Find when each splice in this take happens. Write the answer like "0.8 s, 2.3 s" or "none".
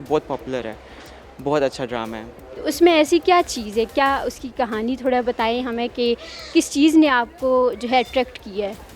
none